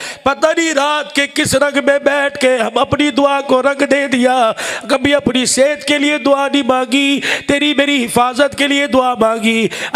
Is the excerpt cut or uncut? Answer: uncut